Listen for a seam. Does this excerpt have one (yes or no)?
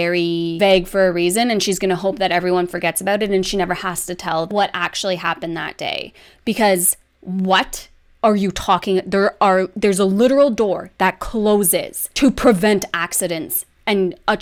no